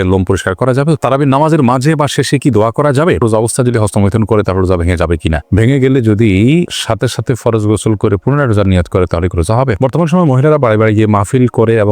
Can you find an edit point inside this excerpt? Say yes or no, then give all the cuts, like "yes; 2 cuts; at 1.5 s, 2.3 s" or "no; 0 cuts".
yes; 3 cuts; at 1.0 s, 3.2 s, 9.8 s